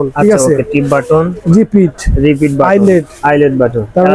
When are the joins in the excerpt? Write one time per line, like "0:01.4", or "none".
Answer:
none